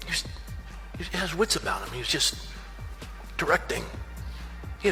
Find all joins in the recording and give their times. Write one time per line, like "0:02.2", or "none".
none